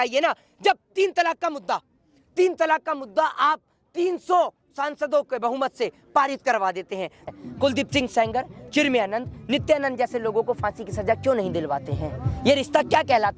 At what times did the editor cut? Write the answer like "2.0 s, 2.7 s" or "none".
7.3 s